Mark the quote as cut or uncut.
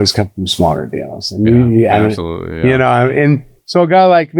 uncut